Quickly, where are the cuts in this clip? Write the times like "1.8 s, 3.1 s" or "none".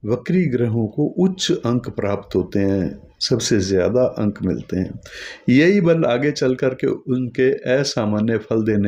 none